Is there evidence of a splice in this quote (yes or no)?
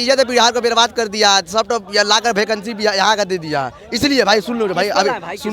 no